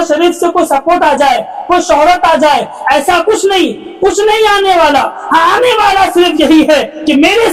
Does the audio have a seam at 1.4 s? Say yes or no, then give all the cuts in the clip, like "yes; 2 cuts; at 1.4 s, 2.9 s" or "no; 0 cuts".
no; 0 cuts